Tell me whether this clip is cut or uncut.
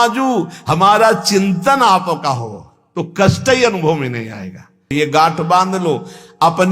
cut